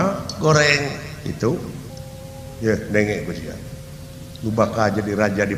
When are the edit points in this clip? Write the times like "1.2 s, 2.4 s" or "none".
none